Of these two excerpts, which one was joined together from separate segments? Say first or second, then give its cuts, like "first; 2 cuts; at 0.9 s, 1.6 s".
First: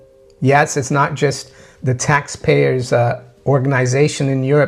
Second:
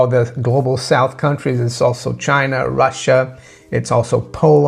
first; 1 cut; at 3.3 s